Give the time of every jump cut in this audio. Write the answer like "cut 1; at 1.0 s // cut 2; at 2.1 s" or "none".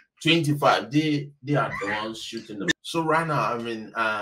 cut 1; at 2.8 s